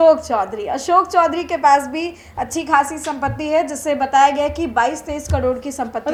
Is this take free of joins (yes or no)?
yes